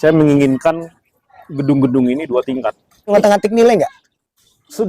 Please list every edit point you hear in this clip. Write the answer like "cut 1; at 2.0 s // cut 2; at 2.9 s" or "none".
cut 1; at 3.1 s

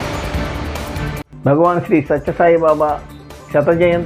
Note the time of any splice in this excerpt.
none

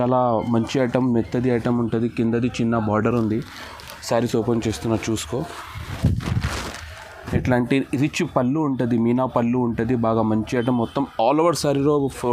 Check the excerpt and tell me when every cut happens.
none

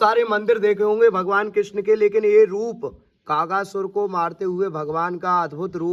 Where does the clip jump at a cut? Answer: none

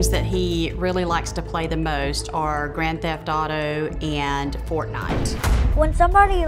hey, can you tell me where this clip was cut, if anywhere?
cut 1; at 5.4 s

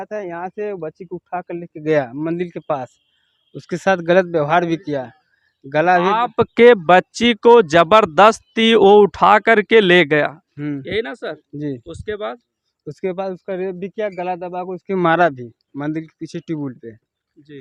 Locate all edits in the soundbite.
none

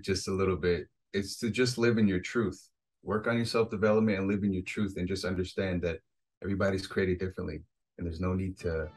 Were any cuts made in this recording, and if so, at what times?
none

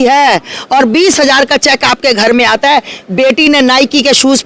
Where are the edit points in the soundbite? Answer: none

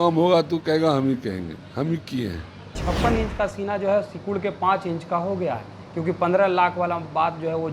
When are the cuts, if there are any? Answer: cut 1; at 2.8 s

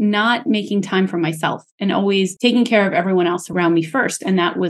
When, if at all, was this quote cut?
cut 1; at 2.3 s // cut 2; at 3.5 s

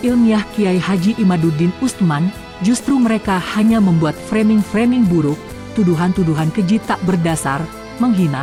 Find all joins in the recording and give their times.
none

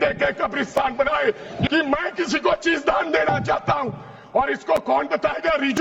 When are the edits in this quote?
cut 1; at 1.7 s

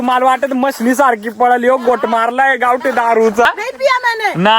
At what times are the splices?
cut 1; at 3.5 s

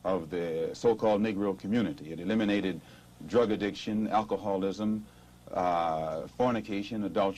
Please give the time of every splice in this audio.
cut 1; at 1.1 s

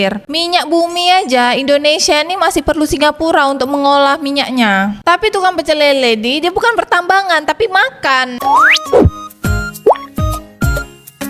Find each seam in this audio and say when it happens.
cut 1; at 5.0 s // cut 2; at 8.3 s

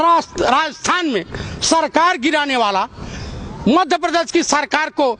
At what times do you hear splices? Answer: none

